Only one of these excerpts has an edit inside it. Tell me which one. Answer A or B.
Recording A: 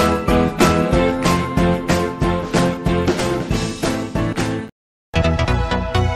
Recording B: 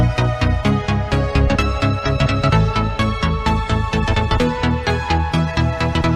A